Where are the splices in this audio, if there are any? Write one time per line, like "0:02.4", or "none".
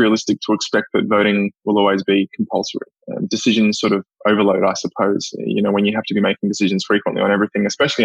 none